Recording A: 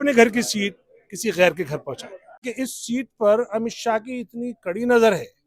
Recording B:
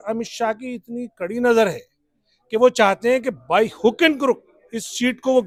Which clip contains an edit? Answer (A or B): A